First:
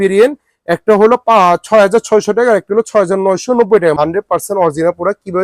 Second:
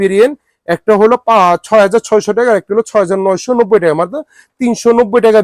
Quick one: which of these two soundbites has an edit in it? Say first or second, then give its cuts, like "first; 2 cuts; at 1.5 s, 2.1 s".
first; 1 cut; at 3.9 s